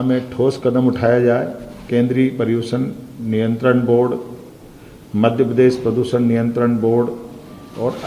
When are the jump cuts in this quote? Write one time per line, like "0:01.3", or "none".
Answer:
0:01.8